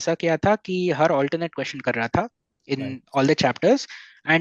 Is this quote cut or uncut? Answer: uncut